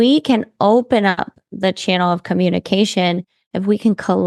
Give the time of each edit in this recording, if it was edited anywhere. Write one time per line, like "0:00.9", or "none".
none